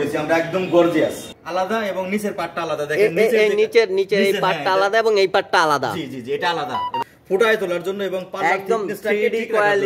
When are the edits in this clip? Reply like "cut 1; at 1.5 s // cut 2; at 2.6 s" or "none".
cut 1; at 1.2 s // cut 2; at 7.0 s